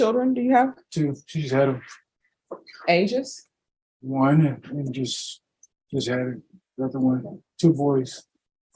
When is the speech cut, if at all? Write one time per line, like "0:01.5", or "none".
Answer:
none